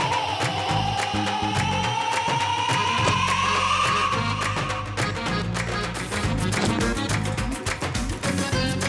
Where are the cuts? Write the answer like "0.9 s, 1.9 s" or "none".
6.0 s